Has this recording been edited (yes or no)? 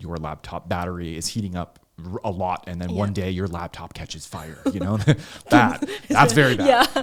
no